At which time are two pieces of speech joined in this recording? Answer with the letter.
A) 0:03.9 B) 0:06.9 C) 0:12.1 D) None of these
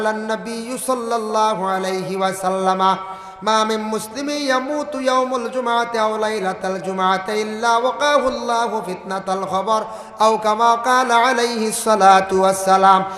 D